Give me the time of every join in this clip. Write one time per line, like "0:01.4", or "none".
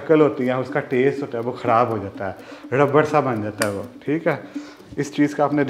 none